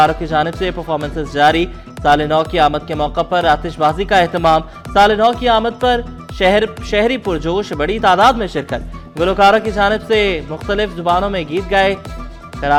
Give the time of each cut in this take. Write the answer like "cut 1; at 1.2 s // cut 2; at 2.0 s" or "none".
none